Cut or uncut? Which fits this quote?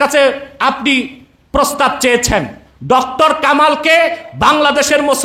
uncut